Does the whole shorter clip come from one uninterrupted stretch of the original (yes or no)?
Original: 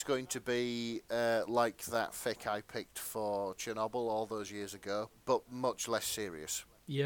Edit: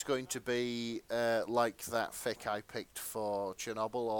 yes